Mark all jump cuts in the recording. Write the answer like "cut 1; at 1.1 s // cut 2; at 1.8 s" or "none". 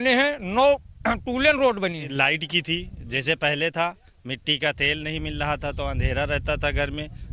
cut 1; at 2.1 s